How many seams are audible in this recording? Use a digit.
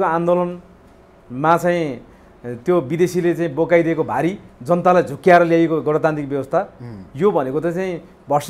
1